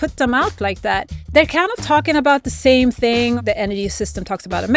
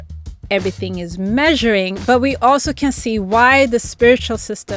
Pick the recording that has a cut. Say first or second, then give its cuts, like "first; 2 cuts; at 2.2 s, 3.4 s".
first; 1 cut; at 3.4 s